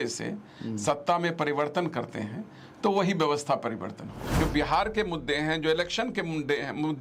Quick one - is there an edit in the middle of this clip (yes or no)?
yes